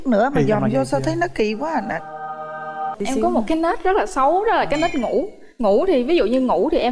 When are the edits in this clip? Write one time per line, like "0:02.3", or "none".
0:02.9